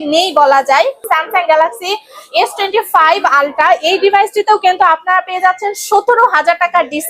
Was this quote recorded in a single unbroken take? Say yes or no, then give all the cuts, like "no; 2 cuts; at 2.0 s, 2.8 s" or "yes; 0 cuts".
no; 1 cut; at 1.0 s